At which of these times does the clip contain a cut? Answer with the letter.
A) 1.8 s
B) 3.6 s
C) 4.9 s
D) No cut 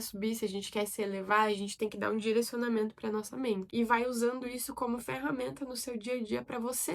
B